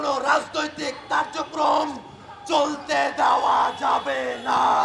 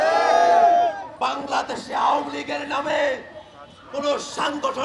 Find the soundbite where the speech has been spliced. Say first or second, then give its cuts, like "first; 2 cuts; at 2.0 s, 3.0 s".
second; 1 cut; at 1.1 s